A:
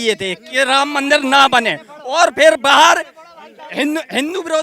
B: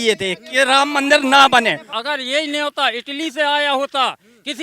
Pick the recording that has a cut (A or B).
B